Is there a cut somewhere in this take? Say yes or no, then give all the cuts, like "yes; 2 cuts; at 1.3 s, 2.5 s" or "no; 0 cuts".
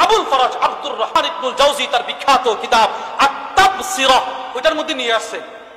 yes; 1 cut; at 1.2 s